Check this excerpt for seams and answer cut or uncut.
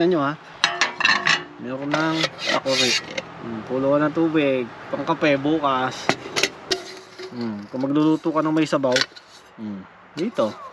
cut